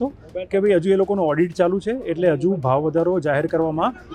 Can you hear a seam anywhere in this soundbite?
no; 0 cuts

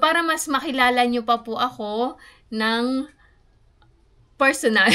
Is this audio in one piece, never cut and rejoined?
yes; 0 cuts

